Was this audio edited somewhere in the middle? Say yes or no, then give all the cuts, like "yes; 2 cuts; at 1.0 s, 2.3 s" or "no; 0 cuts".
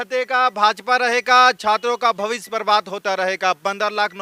no; 0 cuts